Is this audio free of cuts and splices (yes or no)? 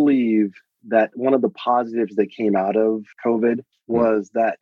yes